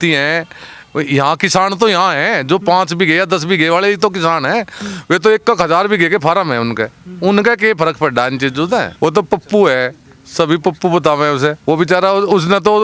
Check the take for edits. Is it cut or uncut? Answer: cut